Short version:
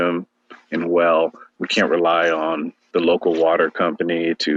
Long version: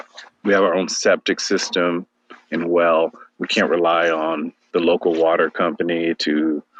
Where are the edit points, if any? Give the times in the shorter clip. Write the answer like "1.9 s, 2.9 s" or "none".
none